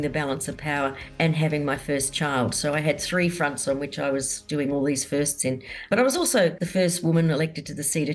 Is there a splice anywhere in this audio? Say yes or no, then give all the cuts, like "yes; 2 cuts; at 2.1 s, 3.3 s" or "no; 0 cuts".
yes; 2 cuts; at 5.9 s, 6.6 s